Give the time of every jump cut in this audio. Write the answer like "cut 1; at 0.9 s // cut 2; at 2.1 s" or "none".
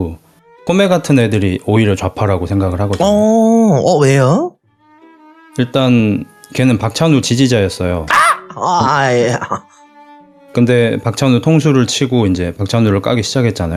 none